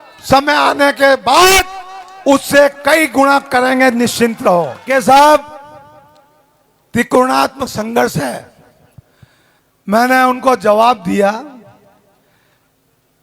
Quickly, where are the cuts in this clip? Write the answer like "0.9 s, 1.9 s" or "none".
4.8 s